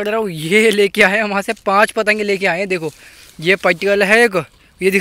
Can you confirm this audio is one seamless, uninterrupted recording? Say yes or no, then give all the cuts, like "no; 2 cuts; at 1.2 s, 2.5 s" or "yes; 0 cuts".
yes; 0 cuts